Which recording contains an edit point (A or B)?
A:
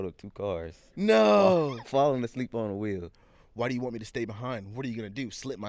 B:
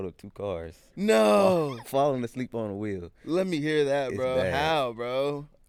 A